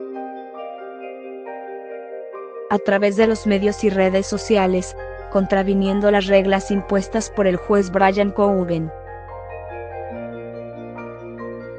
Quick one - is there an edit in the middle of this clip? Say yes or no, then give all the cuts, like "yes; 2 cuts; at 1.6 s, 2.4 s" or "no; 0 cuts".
yes; 2 cuts; at 2.5 s, 8.9 s